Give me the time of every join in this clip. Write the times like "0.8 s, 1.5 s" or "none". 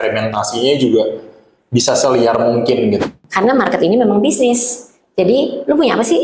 3.0 s